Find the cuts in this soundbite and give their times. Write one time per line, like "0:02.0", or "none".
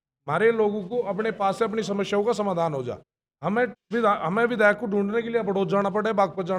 none